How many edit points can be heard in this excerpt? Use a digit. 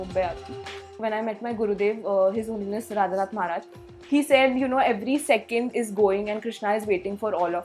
1